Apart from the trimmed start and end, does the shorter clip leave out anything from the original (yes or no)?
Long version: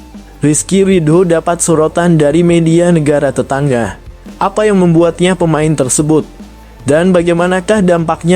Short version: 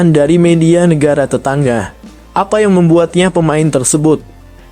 no